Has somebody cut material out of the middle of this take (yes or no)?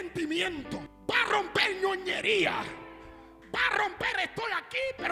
yes